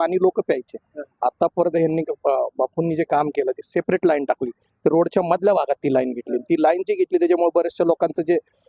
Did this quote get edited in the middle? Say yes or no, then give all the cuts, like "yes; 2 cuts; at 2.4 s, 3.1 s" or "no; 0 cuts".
no; 0 cuts